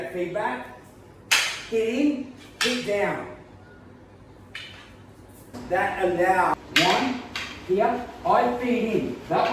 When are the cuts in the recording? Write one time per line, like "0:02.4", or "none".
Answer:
0:06.5